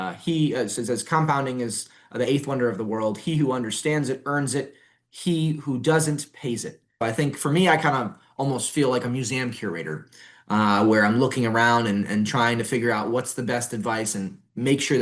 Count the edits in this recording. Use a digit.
1